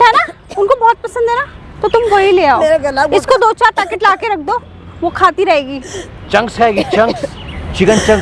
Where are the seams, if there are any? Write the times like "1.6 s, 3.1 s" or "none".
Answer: none